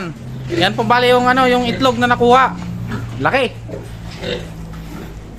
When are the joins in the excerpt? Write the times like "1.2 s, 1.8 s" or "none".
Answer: none